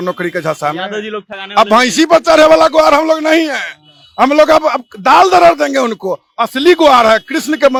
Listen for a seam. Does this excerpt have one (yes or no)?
no